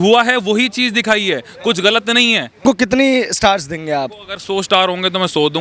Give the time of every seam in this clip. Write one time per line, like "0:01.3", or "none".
0:02.6